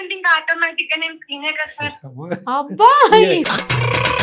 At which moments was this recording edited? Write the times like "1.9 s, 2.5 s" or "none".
none